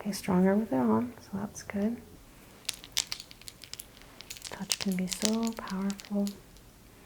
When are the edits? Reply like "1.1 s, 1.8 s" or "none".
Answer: 2.2 s